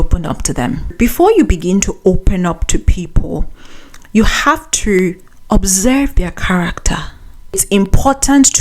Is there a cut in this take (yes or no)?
yes